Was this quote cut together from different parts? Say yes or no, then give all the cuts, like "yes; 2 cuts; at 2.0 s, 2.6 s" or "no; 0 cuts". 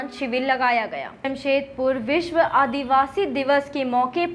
yes; 1 cut; at 1.1 s